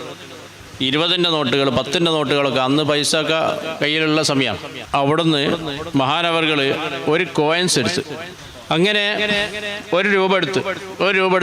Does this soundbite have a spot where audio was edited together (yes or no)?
yes